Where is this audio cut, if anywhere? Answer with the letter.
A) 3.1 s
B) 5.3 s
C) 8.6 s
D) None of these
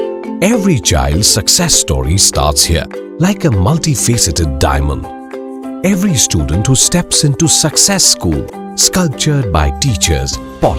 D